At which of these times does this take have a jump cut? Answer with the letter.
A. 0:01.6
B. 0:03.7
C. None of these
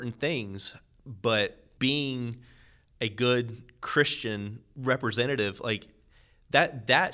A